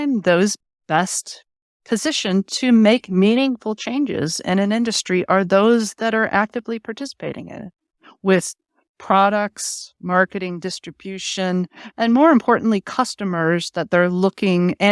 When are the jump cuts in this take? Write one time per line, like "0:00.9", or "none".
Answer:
none